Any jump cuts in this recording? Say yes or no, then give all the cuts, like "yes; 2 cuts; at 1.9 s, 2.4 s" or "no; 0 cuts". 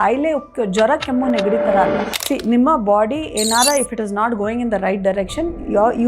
yes; 1 cut; at 2.1 s